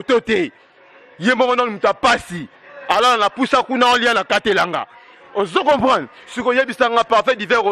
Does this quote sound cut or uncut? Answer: uncut